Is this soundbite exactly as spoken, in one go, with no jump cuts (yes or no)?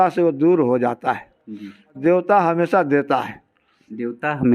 no